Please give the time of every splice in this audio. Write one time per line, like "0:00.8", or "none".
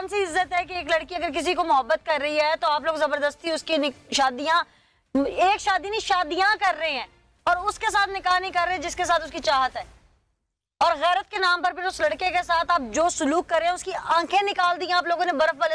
none